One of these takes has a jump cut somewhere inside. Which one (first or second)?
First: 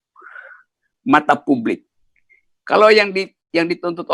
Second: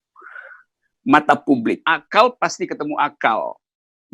second